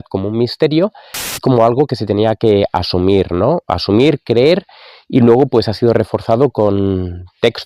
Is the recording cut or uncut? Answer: cut